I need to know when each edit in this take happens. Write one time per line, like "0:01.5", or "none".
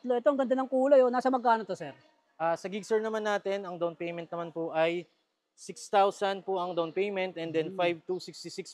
none